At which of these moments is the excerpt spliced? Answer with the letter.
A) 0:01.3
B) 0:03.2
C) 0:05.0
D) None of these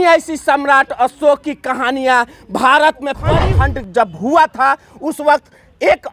B